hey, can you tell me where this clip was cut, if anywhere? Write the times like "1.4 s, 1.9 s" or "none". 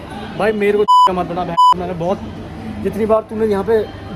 none